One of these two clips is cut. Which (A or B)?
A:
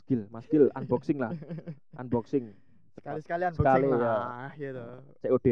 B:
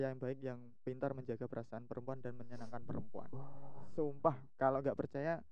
B